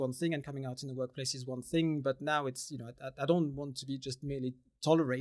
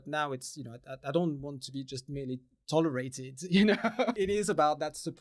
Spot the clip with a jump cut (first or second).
second